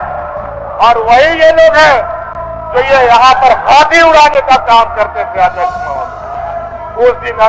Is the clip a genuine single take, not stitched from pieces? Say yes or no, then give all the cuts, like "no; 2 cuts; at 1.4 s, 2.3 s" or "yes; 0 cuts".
no; 1 cut; at 6.2 s